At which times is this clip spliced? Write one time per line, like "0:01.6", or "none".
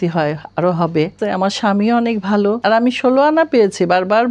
0:01.2
0:02.6